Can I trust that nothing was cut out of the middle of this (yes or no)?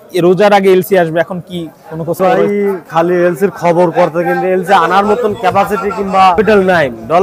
no